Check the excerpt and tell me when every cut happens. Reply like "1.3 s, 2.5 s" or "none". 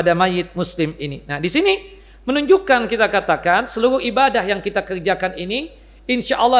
none